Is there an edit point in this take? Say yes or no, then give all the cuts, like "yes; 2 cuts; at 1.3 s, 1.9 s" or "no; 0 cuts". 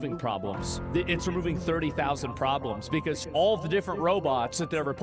no; 0 cuts